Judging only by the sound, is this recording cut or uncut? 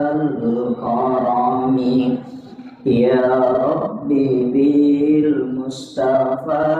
uncut